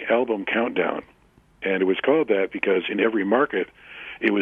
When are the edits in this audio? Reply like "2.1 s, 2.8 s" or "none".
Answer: none